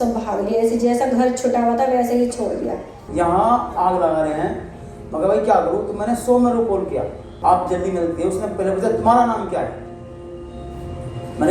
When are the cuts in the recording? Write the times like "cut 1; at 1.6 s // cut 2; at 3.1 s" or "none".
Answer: cut 1; at 2.9 s // cut 2; at 7.2 s